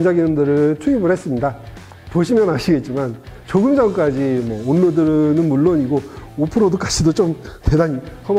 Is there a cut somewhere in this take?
yes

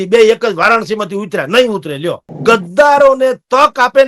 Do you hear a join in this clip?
yes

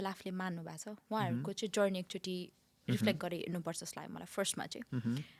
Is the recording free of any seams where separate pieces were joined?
yes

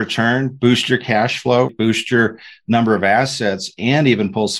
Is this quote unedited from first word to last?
no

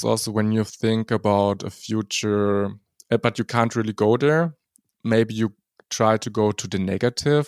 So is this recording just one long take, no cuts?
yes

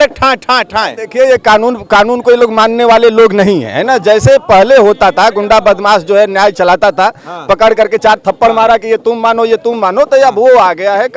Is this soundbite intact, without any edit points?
yes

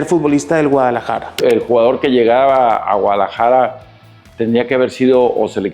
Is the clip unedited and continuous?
no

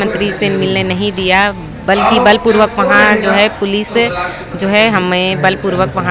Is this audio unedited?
yes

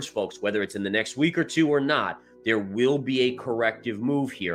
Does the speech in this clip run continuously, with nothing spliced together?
yes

